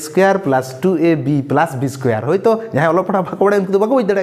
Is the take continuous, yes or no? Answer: yes